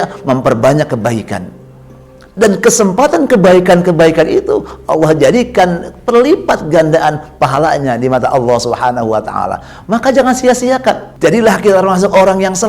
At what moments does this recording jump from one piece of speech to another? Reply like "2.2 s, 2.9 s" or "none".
11.1 s